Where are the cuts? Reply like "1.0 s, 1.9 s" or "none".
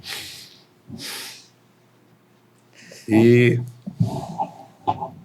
2.9 s